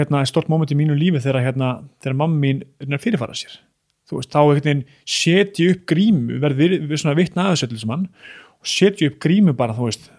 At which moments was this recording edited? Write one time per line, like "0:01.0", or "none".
none